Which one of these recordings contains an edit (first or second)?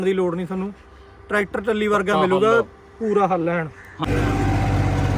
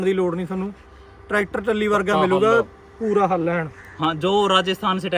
first